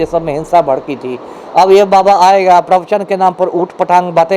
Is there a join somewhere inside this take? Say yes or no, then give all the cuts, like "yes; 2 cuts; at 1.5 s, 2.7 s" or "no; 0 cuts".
no; 0 cuts